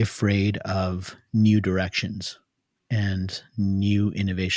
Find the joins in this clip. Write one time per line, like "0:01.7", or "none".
none